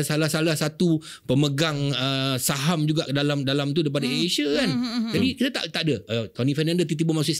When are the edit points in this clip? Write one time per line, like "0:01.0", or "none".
none